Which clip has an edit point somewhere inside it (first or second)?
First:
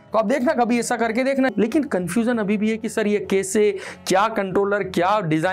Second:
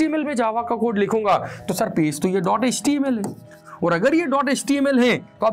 first